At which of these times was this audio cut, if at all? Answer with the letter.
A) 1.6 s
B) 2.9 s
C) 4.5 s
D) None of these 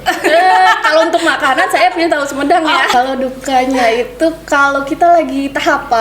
B